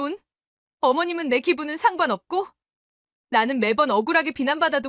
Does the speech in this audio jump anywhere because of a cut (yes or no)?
no